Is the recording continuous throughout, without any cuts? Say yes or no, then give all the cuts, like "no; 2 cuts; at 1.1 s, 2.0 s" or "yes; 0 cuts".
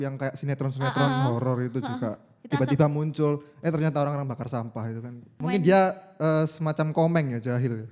no; 1 cut; at 5.4 s